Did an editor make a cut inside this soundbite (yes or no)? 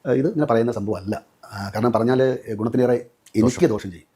no